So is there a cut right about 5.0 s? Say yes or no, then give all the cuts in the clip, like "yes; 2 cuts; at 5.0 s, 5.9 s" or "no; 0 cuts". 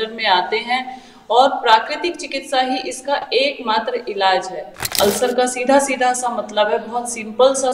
yes; 1 cut; at 5.0 s